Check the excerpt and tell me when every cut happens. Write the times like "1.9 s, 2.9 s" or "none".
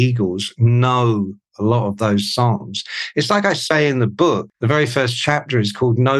4.5 s